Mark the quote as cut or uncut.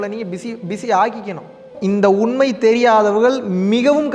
cut